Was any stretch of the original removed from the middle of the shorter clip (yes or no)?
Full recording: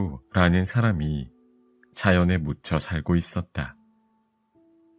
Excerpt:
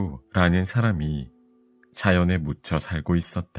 no